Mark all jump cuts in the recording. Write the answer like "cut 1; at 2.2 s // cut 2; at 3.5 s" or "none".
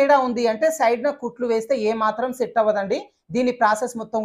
none